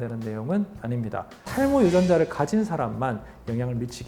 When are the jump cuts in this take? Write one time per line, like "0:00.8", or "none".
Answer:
0:01.5